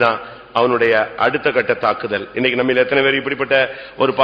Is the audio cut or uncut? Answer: uncut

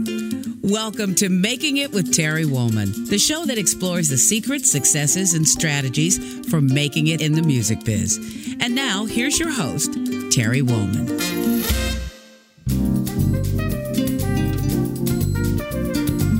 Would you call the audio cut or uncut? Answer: uncut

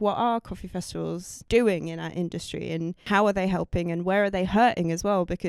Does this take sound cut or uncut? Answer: cut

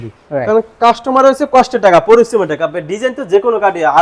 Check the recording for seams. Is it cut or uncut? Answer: uncut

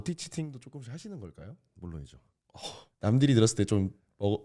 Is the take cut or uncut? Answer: cut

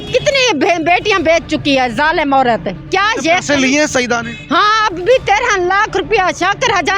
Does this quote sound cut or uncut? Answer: uncut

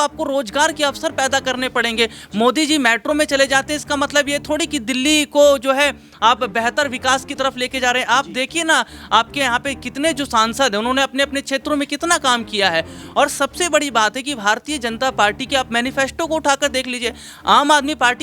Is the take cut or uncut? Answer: uncut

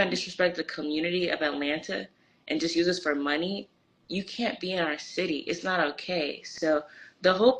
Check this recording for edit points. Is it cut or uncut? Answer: uncut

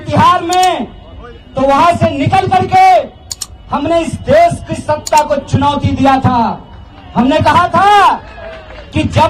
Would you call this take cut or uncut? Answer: uncut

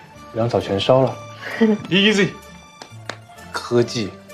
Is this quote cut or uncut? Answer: uncut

